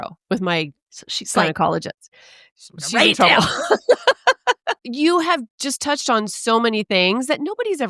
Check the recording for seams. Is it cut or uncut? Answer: cut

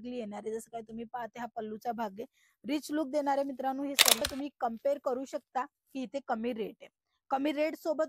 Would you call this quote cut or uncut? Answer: cut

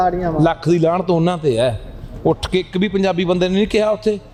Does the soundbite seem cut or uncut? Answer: uncut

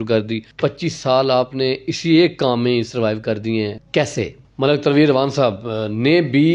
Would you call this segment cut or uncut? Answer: cut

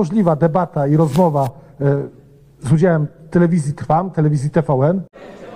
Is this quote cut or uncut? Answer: uncut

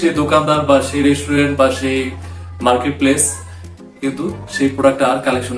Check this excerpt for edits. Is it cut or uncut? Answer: uncut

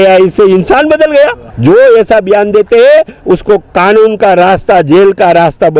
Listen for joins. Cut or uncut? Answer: cut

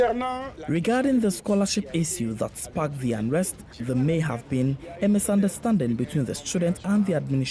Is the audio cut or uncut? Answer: uncut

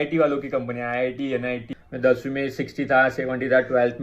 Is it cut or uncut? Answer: cut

